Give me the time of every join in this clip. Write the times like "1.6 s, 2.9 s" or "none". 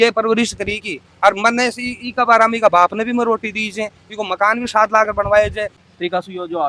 5.8 s